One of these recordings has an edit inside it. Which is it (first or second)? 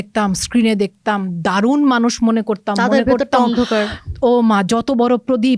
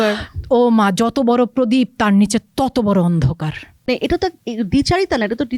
second